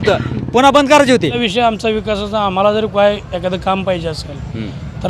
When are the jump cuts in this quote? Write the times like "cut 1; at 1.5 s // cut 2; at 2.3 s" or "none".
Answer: cut 1; at 1.4 s